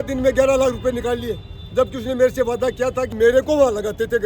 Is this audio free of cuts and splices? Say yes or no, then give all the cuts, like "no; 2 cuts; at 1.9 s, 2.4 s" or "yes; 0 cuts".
no; 1 cut; at 3.1 s